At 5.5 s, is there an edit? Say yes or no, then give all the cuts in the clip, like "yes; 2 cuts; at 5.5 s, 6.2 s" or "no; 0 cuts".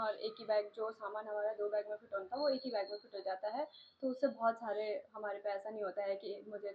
no; 0 cuts